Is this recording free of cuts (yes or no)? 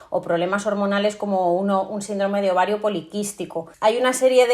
no